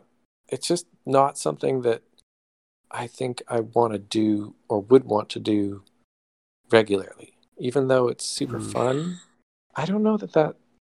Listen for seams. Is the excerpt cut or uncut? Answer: uncut